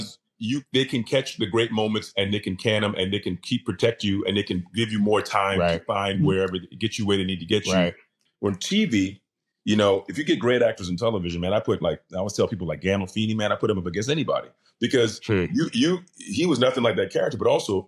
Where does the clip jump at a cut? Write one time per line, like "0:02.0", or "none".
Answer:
0:08.2